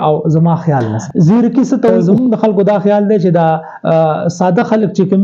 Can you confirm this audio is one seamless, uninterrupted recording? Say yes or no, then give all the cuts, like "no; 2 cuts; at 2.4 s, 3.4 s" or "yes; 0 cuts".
no; 2 cuts; at 1.0 s, 2.0 s